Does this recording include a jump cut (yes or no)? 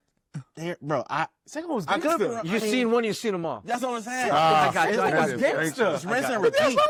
no